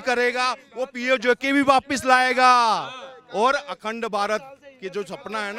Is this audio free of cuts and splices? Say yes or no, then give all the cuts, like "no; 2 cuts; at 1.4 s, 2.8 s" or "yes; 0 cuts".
yes; 0 cuts